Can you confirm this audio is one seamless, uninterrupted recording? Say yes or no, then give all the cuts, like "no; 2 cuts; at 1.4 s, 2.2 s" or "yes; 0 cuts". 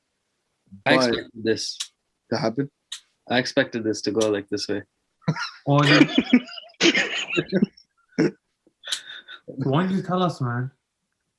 yes; 0 cuts